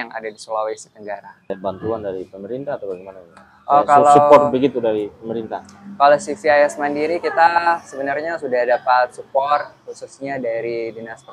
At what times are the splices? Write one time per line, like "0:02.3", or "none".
0:01.5